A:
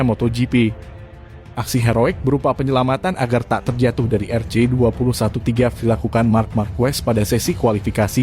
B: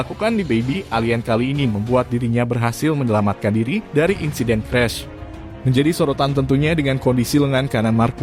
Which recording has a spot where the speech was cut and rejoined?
A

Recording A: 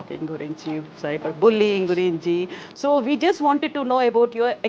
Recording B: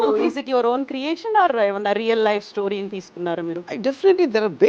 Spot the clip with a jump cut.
B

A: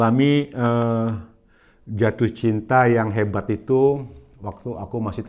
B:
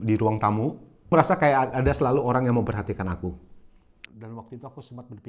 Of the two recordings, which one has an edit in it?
B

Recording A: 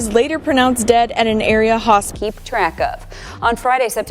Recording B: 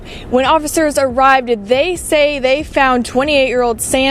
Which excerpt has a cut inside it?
A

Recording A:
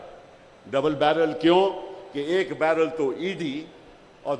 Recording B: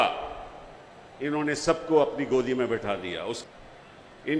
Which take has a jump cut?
B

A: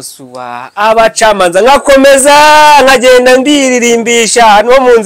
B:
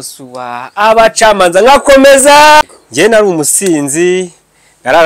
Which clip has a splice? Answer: B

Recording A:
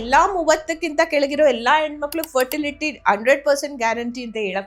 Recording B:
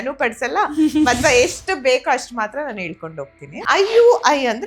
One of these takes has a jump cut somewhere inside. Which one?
B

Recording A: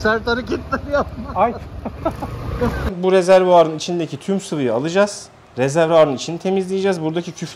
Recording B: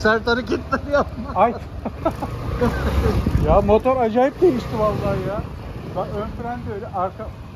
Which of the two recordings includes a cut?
A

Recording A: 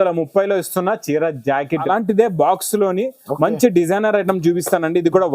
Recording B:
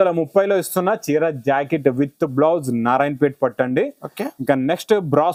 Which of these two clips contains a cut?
A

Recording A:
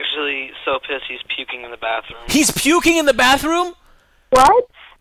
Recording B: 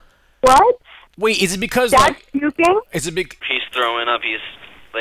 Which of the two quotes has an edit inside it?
B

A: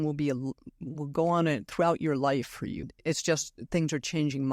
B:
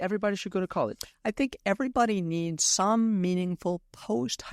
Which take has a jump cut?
A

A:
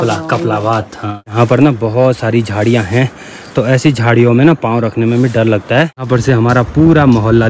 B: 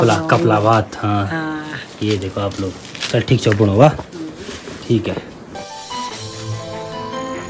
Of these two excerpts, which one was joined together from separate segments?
A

